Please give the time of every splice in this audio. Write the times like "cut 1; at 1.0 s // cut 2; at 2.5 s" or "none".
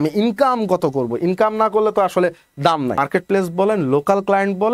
cut 1; at 3.0 s